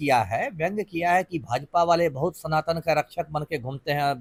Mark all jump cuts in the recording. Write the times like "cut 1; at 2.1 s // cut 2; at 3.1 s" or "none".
none